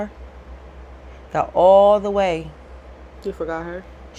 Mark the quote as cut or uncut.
uncut